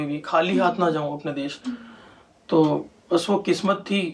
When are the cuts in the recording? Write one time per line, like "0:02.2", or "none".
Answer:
none